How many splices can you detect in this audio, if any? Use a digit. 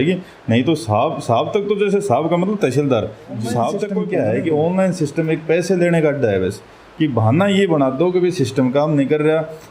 1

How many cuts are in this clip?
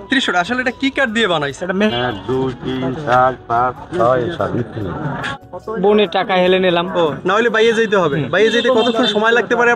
2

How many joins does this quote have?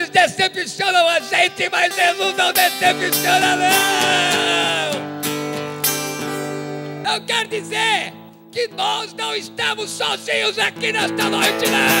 1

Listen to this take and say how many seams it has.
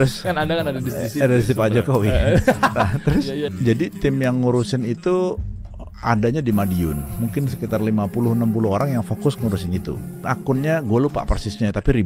2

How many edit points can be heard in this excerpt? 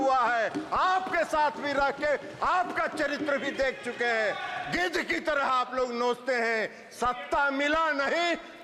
0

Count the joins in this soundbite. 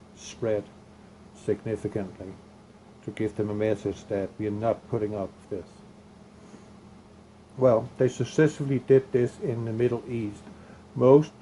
1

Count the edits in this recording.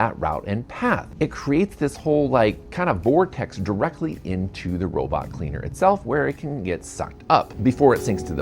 1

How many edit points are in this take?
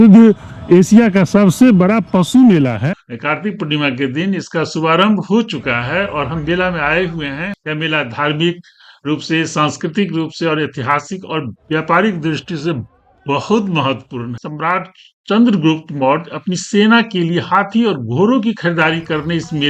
3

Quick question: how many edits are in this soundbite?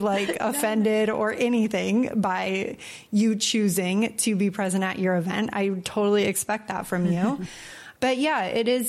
1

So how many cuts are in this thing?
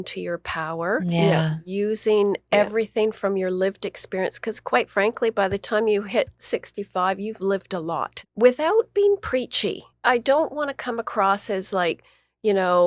2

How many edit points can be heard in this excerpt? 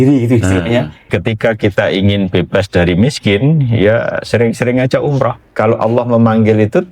2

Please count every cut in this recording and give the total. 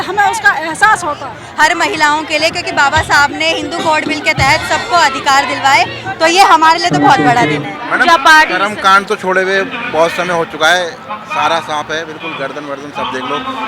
2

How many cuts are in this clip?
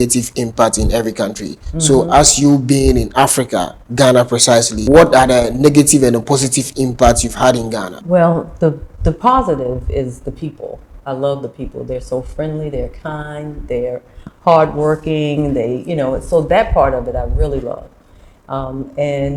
2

